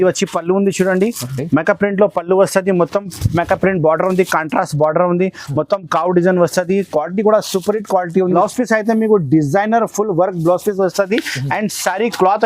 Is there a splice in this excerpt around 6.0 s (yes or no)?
no